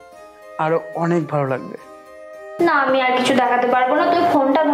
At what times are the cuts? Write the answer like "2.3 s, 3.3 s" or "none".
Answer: none